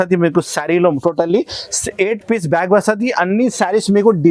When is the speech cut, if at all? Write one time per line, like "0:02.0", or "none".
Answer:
none

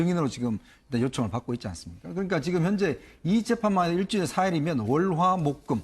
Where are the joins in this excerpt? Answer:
0:04.8

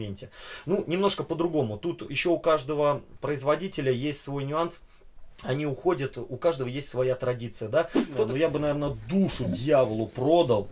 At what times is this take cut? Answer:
0:08.2

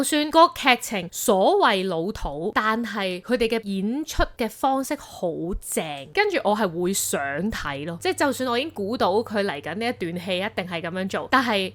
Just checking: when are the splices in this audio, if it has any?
none

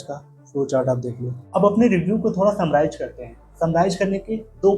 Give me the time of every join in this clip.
0:01.3

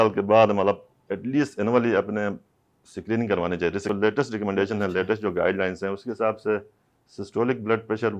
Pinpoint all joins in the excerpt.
0:03.9

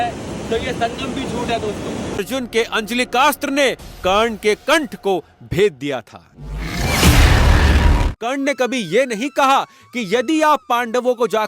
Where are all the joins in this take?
0:02.2
0:08.1

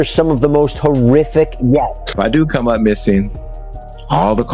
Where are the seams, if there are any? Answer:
0:02.0

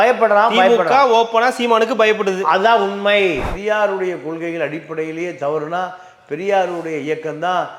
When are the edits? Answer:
0:03.5

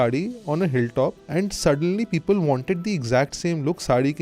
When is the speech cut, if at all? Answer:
0:01.2

